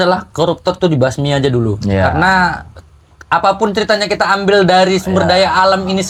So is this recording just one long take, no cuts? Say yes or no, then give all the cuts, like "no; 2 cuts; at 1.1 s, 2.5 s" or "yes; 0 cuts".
yes; 0 cuts